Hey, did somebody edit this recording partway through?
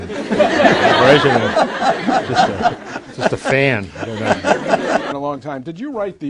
no; 0 cuts

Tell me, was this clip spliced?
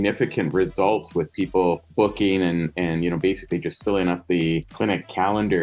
yes; 2 cuts; at 1.9 s, 4.7 s

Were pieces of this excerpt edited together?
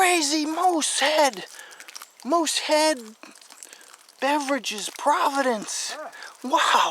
no; 0 cuts

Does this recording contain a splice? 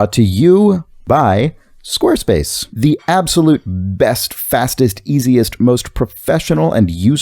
yes; 2 cuts; at 1.0 s, 2.6 s

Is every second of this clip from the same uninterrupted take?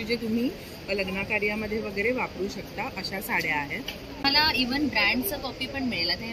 no; 1 cut; at 4.2 s

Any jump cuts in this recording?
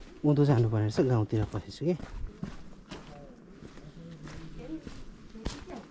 yes; 1 cut; at 2.3 s

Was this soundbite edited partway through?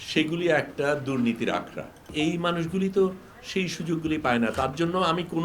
yes; 1 cut; at 2.1 s

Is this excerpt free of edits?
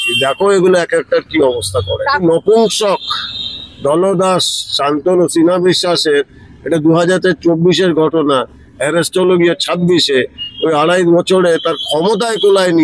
no; 1 cut; at 2.2 s

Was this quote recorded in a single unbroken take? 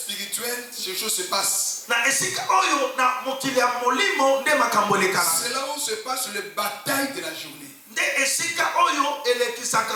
yes; 0 cuts

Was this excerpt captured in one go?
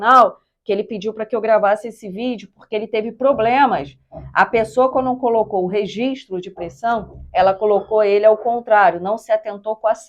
yes; 0 cuts

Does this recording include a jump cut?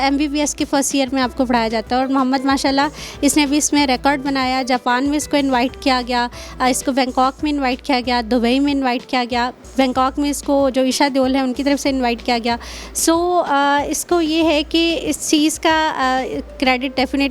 no; 0 cuts

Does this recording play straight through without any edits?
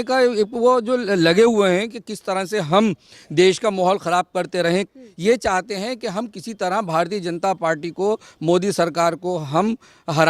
no; 1 cut; at 5.0 s

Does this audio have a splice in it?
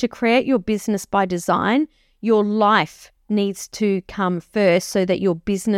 no; 0 cuts

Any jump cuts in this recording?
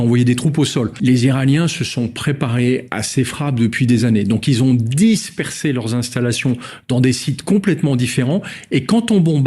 yes; 1 cut; at 0.9 s

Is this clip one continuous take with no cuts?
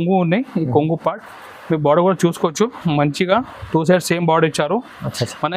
yes; 0 cuts

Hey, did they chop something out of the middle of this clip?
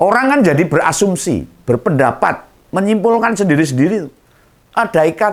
no; 0 cuts

